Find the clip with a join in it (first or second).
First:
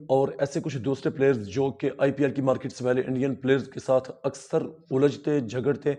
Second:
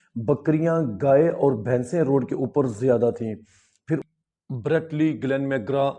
second